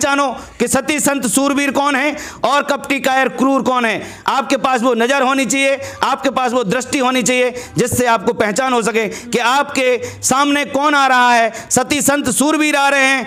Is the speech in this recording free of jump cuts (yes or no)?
yes